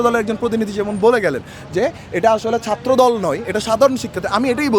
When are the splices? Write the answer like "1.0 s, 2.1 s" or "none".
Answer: none